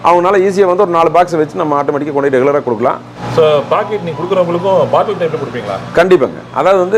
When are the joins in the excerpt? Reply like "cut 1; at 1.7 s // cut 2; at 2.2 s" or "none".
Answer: none